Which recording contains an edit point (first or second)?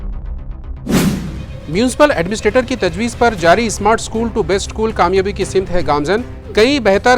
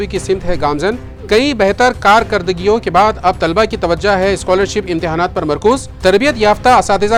first